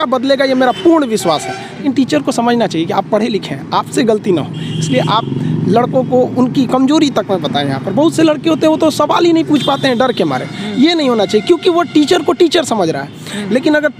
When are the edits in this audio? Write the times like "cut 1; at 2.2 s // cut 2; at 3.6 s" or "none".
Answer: cut 1; at 1.7 s